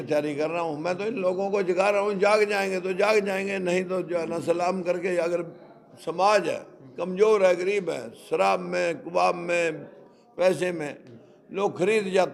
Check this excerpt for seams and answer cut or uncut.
uncut